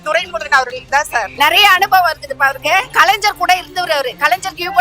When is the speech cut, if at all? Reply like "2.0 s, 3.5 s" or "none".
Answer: 1.3 s